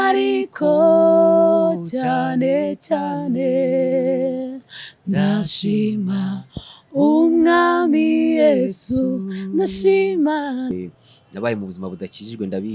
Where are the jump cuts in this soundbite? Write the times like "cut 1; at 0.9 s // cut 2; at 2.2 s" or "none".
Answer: cut 1; at 10.7 s

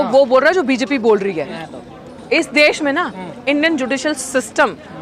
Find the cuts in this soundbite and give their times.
cut 1; at 1.6 s

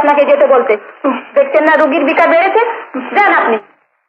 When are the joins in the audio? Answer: none

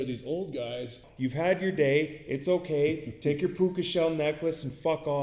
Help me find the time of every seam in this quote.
cut 1; at 1.0 s

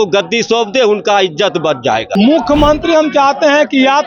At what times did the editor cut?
cut 1; at 2.1 s

